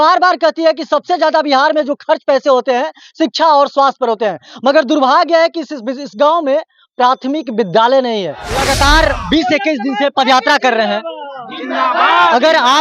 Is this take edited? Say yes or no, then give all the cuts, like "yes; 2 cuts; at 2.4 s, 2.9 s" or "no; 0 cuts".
yes; 1 cut; at 8.5 s